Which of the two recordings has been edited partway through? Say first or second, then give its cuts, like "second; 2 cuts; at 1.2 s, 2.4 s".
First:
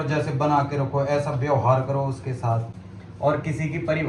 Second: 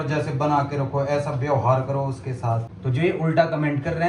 second; 1 cut; at 2.8 s